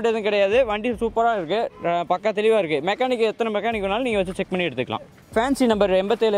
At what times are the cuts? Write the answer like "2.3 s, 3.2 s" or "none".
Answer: 5.2 s

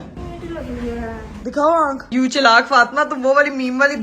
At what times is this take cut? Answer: 2.0 s

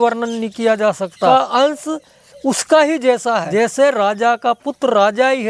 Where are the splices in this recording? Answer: 1.3 s, 3.5 s

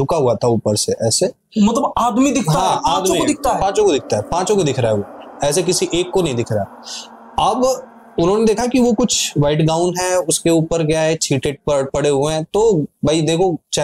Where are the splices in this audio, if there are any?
none

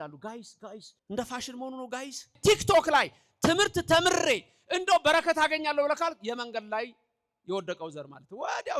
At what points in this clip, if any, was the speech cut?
0.9 s, 2.4 s

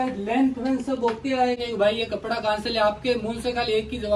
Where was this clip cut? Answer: 1.6 s

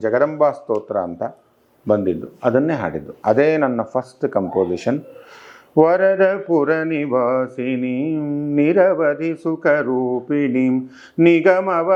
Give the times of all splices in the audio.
none

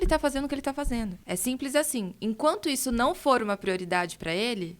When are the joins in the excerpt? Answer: 1.2 s

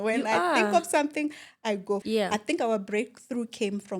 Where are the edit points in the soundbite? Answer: 2.0 s

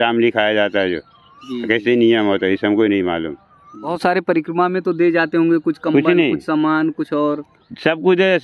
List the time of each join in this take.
4.0 s

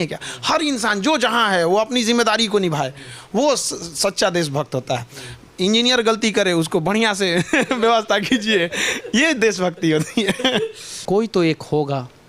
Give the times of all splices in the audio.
10.9 s

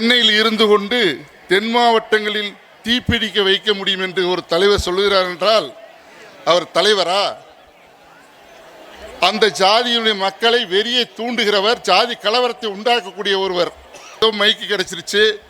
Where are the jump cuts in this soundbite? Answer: 14.2 s

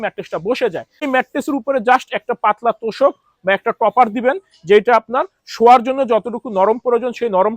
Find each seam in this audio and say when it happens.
1.1 s

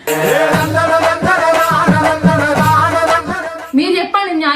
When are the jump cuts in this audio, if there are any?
3.5 s

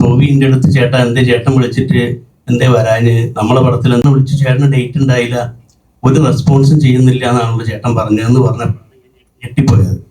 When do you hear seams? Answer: 4.0 s

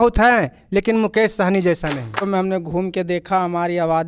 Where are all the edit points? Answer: 2.2 s

